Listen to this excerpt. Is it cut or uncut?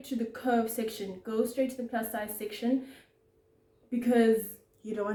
uncut